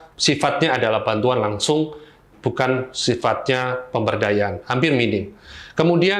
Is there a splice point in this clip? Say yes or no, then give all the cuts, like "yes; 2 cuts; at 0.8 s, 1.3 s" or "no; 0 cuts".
no; 0 cuts